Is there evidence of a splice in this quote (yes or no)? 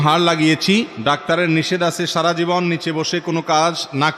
yes